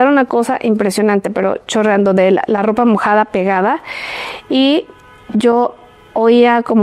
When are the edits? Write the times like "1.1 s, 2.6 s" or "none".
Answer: none